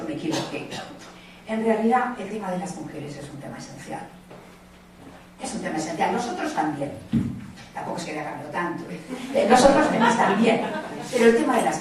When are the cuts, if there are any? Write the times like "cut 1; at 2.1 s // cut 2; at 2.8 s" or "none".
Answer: cut 1; at 4.5 s